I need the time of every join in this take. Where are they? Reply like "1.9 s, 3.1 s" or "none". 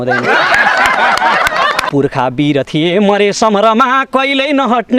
1.8 s